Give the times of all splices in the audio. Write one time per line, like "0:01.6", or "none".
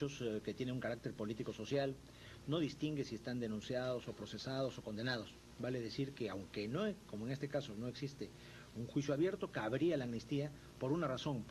0:03.6